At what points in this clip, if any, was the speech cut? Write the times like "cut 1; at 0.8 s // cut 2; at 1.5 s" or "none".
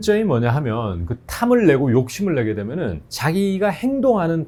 none